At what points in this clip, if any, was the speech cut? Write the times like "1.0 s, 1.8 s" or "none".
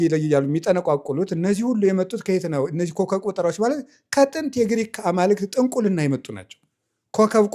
none